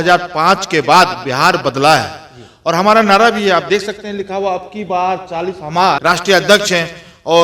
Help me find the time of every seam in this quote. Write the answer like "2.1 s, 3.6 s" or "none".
6.0 s